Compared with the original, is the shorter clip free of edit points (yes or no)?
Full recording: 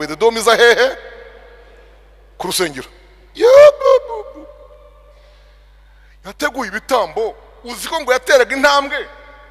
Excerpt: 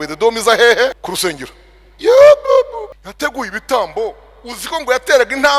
no